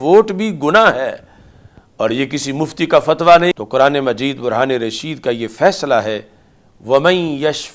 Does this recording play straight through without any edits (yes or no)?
no